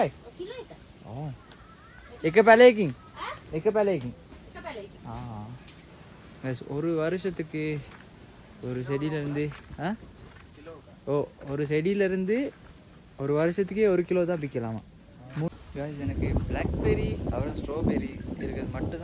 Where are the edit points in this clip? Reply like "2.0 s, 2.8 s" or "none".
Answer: 15.5 s

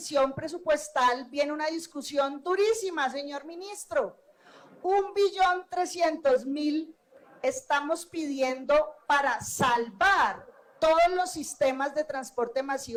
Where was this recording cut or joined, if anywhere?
none

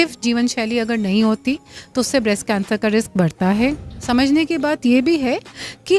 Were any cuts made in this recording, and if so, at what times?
3.9 s

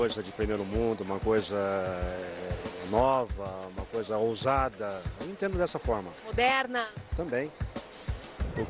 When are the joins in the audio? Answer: 5.6 s

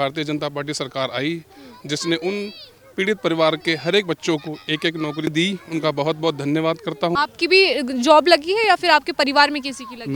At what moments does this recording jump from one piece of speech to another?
5.3 s, 7.1 s

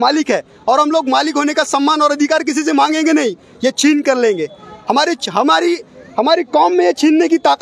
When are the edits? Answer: none

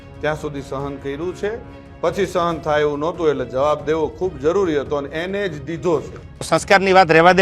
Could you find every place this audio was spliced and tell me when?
6.5 s

